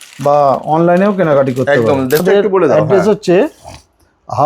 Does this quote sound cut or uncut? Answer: cut